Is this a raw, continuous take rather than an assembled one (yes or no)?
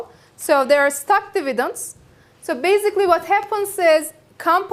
yes